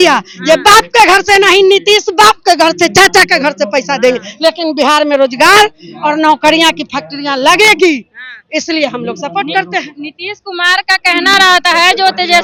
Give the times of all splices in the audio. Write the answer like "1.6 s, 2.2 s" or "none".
none